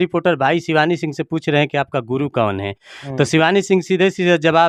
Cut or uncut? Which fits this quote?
uncut